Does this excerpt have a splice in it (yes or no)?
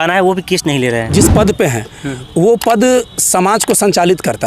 yes